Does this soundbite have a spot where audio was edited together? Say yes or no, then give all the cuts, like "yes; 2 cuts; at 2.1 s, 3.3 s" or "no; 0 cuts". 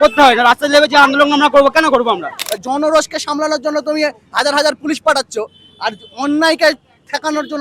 yes; 1 cut; at 2.4 s